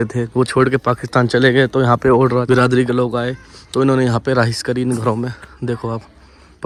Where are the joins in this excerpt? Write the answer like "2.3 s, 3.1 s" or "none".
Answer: none